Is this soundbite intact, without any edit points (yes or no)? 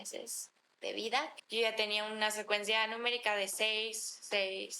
no